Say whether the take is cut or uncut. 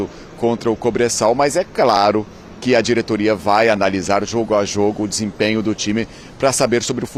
uncut